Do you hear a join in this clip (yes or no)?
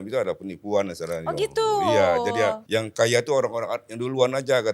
yes